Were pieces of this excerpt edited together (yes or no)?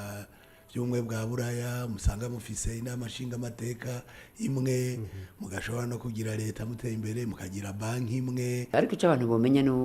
yes